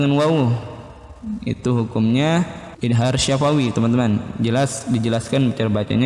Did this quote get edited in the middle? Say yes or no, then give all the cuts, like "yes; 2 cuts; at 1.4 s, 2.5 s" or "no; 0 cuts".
yes; 1 cut; at 2.6 s